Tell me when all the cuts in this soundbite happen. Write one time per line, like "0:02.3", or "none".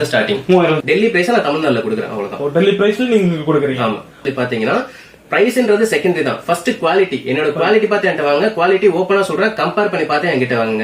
0:00.8
0:04.2